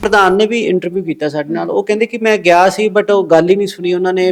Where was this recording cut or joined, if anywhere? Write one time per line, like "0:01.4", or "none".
none